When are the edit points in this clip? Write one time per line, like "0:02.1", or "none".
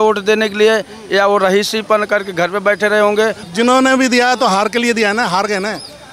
0:03.4